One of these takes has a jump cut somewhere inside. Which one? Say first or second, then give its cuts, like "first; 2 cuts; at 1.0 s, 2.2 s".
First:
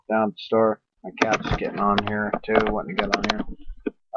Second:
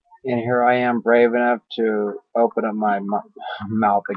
first; 1 cut; at 1.9 s